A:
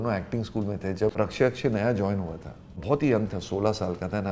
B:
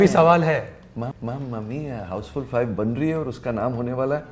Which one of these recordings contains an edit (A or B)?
A